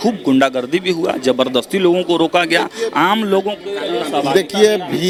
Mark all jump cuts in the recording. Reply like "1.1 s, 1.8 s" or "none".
none